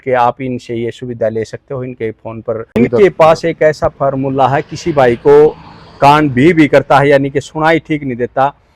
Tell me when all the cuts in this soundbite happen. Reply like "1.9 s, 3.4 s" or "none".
2.8 s

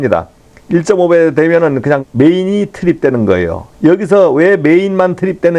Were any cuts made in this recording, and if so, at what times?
none

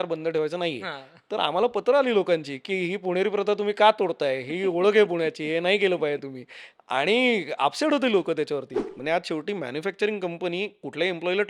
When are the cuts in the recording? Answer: 8.9 s

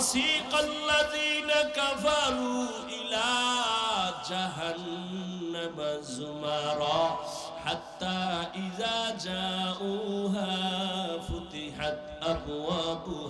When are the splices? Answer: none

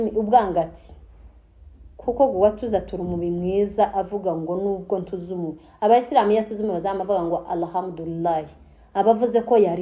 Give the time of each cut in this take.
none

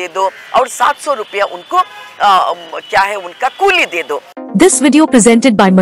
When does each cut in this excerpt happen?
4.3 s

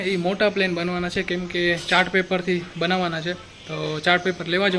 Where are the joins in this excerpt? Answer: none

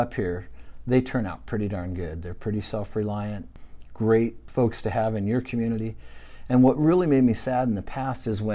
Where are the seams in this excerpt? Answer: 4.4 s

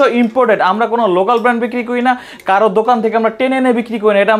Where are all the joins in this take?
none

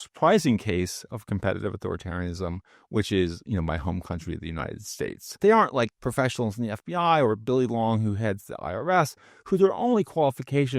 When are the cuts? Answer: 5.4 s

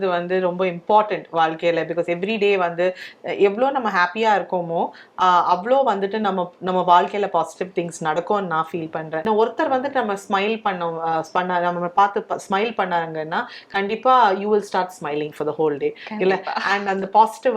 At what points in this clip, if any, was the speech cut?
9.2 s

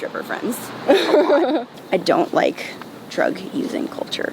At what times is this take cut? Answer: 1.7 s

